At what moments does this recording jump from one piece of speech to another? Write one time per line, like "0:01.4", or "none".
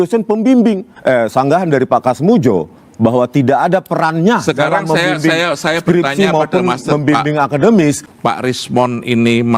0:00.9
0:08.1